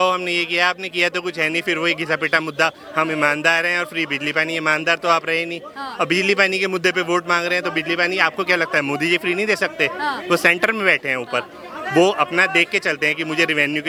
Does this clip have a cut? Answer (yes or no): no